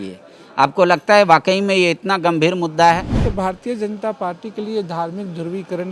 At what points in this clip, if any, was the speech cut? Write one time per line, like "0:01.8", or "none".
0:03.1